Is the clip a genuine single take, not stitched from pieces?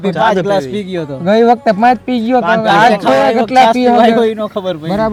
yes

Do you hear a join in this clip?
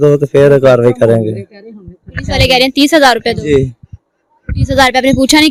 no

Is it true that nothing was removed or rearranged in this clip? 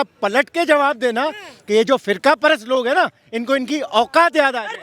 yes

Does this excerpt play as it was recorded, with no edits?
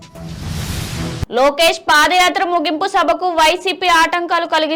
yes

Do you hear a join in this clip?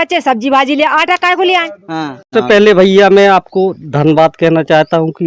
yes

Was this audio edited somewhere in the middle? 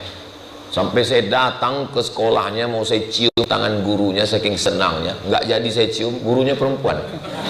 no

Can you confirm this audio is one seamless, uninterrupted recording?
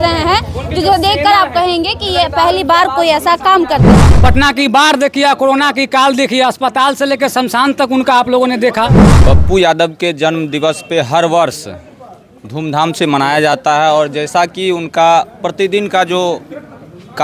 no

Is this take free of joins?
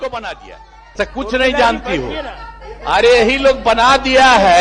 no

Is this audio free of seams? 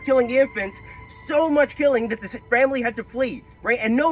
yes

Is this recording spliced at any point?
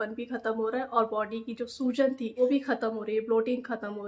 yes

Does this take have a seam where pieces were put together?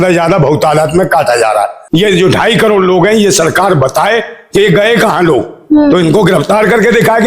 yes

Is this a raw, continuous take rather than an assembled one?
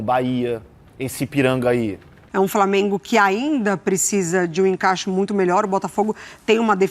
no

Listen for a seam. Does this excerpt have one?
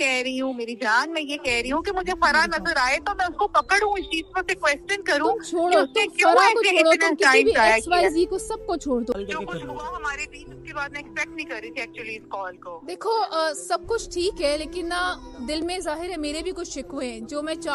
yes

